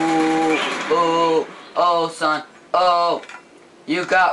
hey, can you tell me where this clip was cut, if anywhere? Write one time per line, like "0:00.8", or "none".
none